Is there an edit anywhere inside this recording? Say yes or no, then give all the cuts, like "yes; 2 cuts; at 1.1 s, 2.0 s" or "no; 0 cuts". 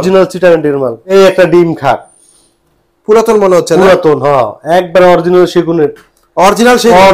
yes; 1 cut; at 1.0 s